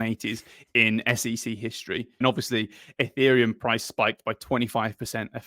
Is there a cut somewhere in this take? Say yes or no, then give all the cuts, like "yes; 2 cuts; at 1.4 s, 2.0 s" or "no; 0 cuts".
yes; 1 cut; at 2.2 s